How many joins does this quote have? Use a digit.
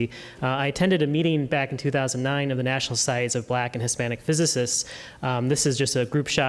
0